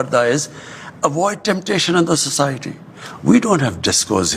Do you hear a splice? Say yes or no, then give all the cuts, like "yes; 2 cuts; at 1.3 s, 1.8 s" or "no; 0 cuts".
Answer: no; 0 cuts